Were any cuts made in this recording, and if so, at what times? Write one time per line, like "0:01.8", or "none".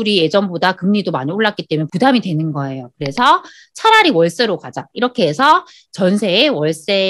0:01.9